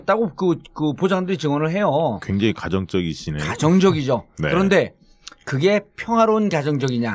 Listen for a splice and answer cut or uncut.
uncut